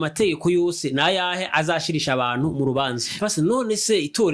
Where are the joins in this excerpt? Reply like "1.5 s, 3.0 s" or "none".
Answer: 3.1 s